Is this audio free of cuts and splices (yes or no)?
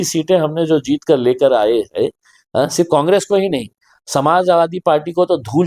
yes